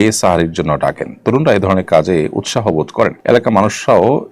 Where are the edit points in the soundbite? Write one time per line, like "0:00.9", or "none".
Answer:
0:03.2